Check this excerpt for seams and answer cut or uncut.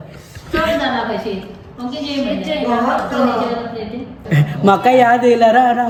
uncut